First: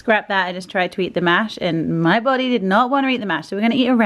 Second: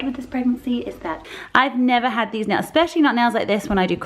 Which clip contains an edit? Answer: second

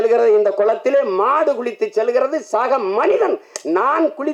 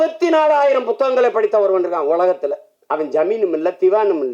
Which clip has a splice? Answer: second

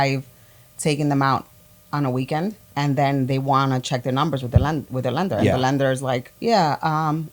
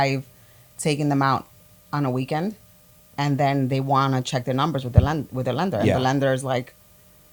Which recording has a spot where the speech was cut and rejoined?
first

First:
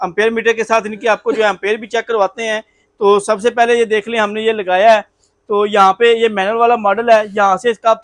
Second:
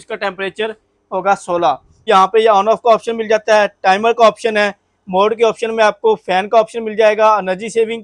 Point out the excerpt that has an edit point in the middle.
second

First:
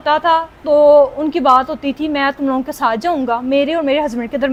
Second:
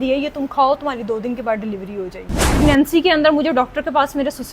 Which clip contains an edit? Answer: second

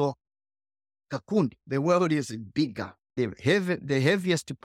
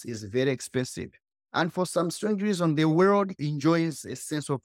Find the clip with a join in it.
first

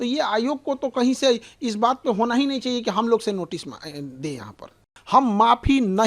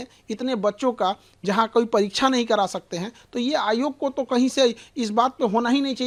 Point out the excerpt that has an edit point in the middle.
first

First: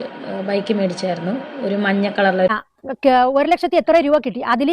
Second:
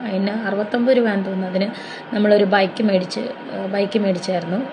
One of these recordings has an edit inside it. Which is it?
first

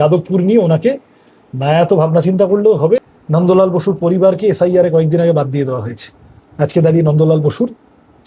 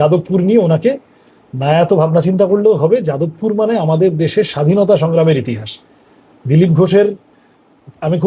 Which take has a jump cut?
first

